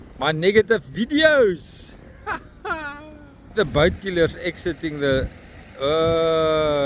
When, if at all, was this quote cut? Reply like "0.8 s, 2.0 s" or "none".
3.5 s